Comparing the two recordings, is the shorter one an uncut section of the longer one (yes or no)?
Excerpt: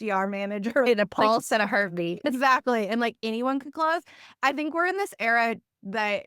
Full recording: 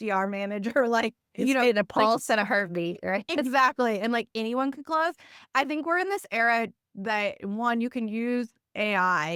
no